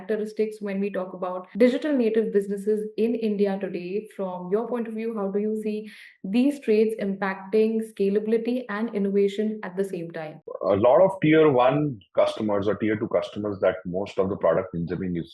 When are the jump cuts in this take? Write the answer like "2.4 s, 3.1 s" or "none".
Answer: 10.5 s